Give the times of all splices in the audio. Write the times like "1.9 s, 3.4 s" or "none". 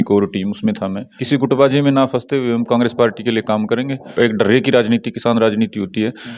1.1 s, 4.1 s